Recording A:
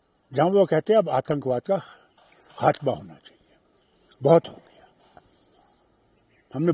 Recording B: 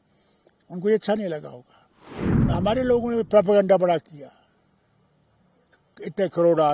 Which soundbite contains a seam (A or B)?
B